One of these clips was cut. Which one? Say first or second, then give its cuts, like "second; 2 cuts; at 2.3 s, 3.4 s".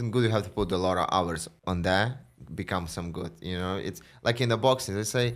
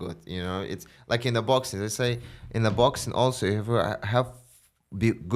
first; 1 cut; at 1.5 s